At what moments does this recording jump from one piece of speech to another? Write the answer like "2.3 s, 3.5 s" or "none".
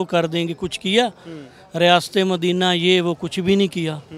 none